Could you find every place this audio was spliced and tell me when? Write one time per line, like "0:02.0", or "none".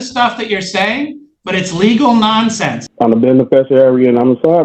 0:02.8